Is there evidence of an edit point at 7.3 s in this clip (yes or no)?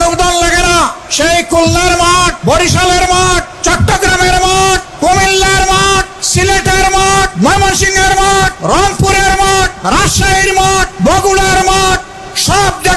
yes